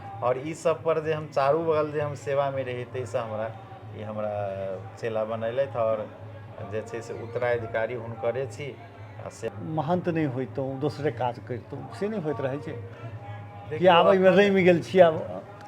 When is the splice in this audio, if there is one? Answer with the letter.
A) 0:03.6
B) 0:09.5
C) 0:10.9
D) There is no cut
B